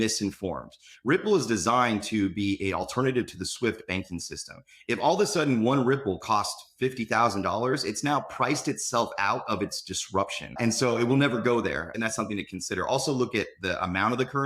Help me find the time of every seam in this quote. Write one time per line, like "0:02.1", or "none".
0:10.6
0:11.9